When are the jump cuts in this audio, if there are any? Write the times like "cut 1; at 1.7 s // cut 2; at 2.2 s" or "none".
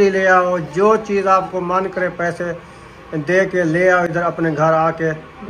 none